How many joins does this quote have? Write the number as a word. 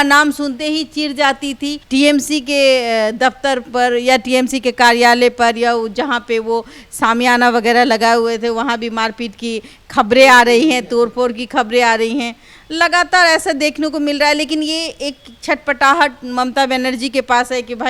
one